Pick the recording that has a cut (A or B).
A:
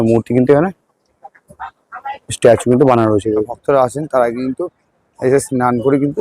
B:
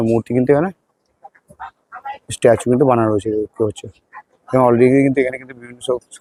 A